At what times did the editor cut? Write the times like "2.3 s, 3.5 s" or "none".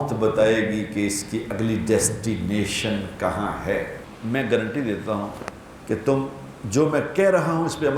4.1 s